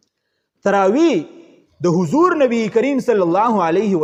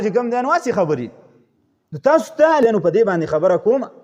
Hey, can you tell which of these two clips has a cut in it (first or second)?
second